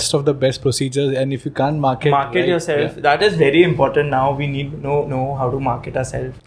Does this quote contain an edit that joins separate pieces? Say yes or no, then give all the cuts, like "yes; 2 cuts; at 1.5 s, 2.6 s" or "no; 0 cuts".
no; 0 cuts